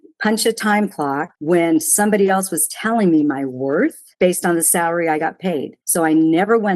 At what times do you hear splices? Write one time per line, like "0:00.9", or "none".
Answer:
0:04.1